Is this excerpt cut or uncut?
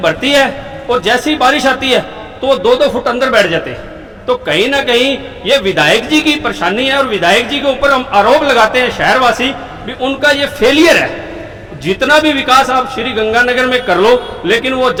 uncut